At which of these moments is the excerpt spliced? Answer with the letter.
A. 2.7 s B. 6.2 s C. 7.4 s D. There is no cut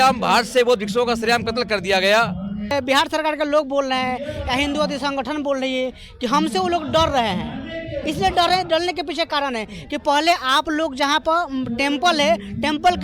A